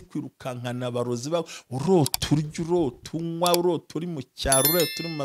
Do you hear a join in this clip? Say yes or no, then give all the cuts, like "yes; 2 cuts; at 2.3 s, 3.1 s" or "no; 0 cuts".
no; 0 cuts